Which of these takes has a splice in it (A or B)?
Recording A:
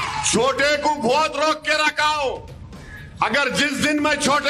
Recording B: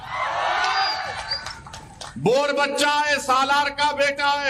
A